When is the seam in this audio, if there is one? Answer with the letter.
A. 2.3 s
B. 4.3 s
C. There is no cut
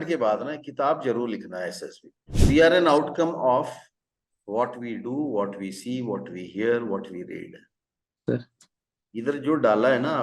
A